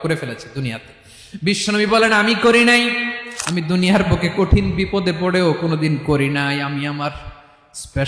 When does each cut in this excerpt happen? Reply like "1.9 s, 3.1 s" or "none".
3.2 s